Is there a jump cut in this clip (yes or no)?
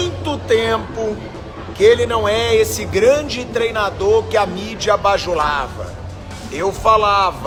no